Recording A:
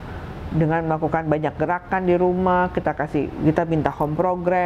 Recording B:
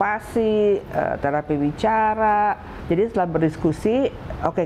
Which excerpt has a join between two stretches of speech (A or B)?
B